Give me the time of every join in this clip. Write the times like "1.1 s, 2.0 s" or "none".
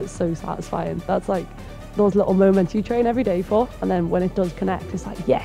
none